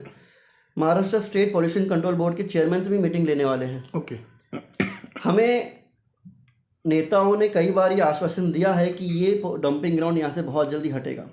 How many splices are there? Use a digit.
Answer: 0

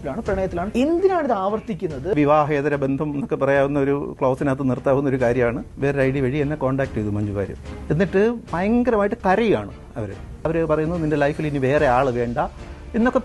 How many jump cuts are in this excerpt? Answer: 0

